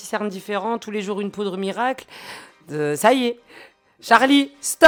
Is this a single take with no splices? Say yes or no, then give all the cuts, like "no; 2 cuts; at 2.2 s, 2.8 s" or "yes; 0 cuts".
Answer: yes; 0 cuts